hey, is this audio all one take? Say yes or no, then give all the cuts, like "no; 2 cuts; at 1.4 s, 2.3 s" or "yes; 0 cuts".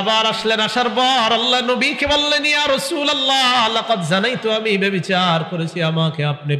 yes; 0 cuts